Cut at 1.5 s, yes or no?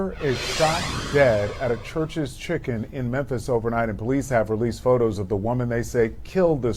no